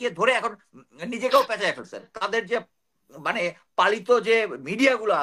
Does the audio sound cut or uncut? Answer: cut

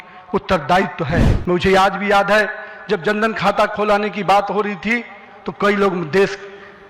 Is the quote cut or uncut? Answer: cut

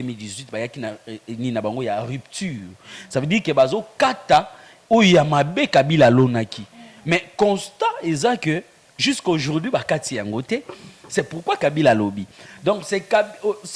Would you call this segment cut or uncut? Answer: uncut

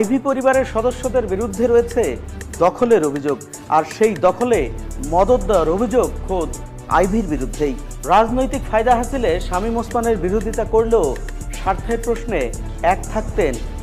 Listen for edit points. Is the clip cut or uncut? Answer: uncut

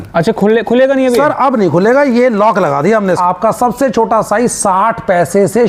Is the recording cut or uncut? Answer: cut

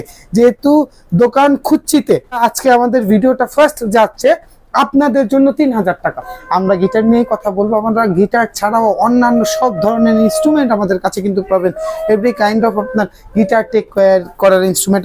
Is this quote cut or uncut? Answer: cut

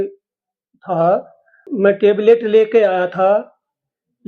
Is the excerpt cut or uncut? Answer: cut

